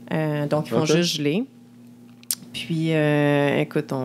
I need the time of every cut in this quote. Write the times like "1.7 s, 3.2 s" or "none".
none